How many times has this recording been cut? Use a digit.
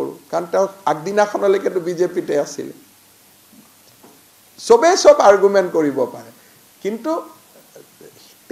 0